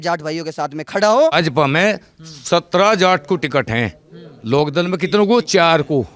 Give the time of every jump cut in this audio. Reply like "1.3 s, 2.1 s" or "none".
1.3 s